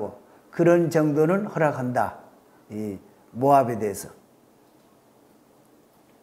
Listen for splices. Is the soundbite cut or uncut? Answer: uncut